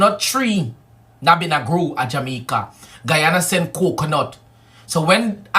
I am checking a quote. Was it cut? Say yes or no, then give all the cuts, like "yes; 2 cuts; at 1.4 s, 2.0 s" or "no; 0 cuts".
yes; 1 cut; at 2.6 s